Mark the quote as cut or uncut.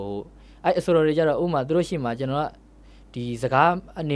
uncut